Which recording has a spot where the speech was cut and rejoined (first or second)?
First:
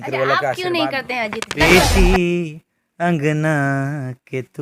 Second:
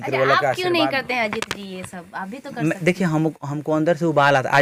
first